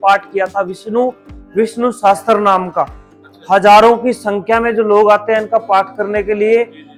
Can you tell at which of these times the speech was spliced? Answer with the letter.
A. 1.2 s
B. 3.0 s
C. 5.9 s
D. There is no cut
D